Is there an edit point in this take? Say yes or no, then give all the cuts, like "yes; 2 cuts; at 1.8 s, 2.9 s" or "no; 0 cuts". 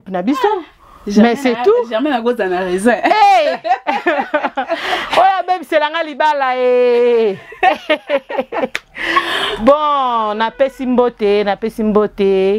no; 0 cuts